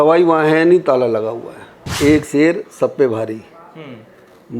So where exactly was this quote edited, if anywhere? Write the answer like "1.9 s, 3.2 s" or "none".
1.8 s